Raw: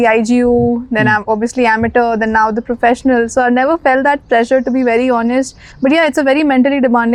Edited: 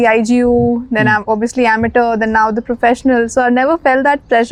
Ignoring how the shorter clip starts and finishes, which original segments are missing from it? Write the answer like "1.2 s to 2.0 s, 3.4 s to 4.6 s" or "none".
none